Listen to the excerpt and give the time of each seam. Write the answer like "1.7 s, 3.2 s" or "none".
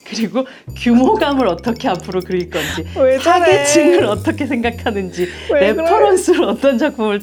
none